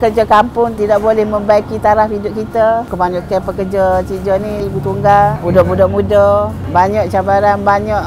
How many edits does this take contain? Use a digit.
2